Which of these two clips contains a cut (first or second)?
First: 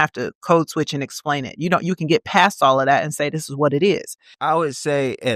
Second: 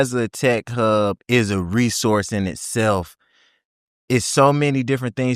first